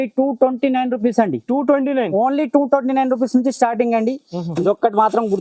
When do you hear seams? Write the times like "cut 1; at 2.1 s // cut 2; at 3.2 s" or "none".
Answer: cut 1; at 4.5 s